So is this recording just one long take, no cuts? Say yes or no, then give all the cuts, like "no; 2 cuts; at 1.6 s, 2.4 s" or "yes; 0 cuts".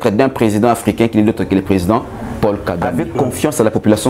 no; 1 cut; at 3.0 s